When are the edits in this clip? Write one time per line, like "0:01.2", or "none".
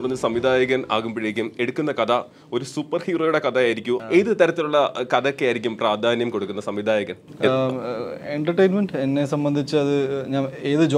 0:04.0